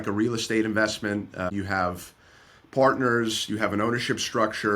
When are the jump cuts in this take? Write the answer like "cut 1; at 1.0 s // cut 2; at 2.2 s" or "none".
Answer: cut 1; at 1.5 s